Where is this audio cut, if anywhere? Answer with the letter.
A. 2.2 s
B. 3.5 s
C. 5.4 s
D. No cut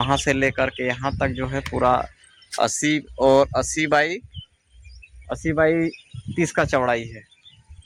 D